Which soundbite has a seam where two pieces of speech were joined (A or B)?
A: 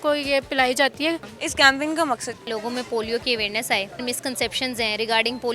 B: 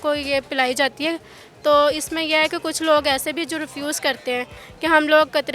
A